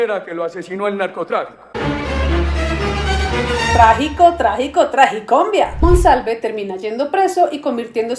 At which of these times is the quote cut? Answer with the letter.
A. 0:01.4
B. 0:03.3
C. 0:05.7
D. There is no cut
C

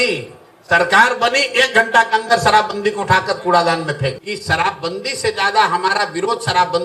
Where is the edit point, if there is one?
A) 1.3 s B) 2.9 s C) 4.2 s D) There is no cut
C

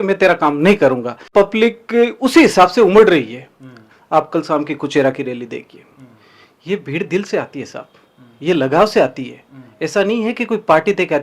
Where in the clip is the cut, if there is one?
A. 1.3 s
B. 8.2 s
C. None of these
A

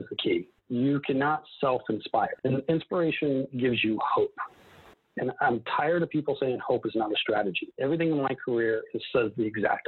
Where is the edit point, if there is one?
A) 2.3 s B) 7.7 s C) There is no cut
A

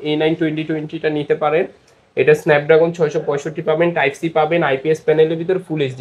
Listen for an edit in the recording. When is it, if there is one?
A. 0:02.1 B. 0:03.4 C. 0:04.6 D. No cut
D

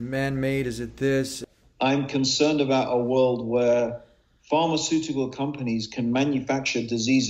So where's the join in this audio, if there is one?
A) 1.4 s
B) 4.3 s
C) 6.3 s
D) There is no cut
A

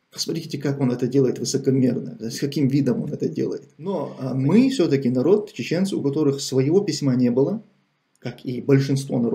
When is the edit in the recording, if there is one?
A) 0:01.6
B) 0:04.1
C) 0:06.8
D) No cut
B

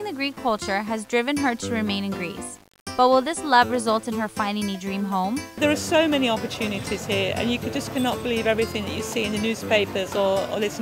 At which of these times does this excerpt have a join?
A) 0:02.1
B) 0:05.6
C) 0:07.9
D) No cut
B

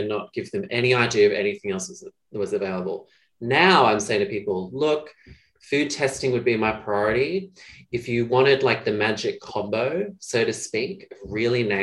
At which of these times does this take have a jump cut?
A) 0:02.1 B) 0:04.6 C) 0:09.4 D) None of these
C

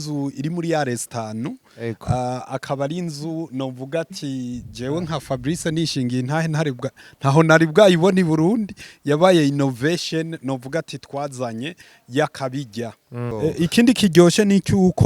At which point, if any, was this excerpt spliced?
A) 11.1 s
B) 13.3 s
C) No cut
B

